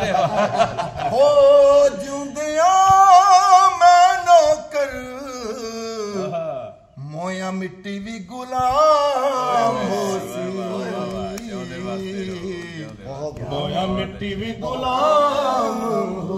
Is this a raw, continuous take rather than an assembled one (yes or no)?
yes